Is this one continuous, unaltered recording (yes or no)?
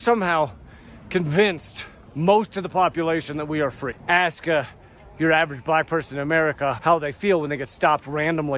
no